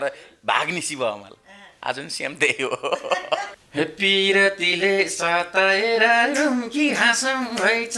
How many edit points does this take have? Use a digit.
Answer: 1